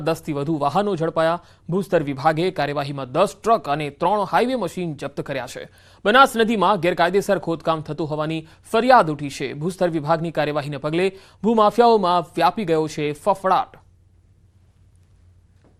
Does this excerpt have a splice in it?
no; 0 cuts

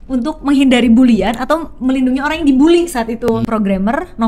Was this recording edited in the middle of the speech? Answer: yes; 1 cut; at 3.3 s

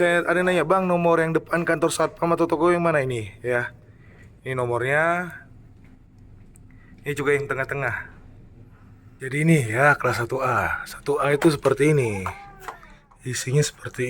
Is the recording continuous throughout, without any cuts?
no; 1 cut; at 9.0 s

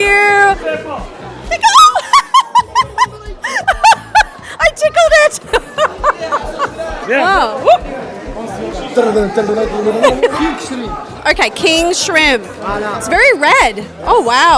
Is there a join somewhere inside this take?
yes; 1 cut; at 10.3 s

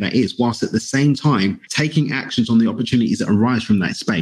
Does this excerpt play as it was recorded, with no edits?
no; 1 cut; at 1.7 s

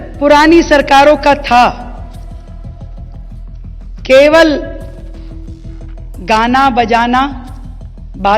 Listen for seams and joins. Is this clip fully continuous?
no; 2 cuts; at 2.0 s, 4.1 s

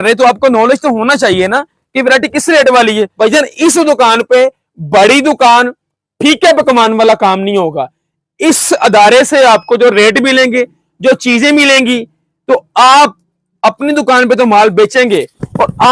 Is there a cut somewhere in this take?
yes; 1 cut; at 3.1 s

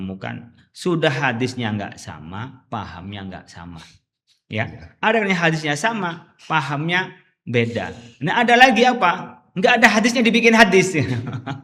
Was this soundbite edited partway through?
no; 0 cuts

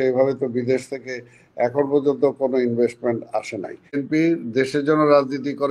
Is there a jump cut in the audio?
yes; 1 cut; at 4.0 s

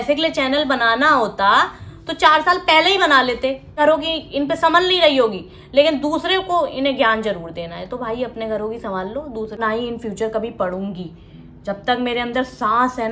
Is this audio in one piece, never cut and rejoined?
no; 2 cuts; at 3.8 s, 9.6 s

